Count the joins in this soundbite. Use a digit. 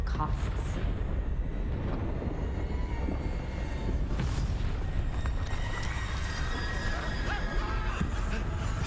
0